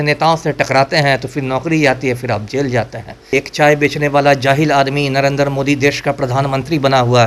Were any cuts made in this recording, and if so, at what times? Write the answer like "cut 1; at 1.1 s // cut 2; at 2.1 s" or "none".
cut 1; at 3.3 s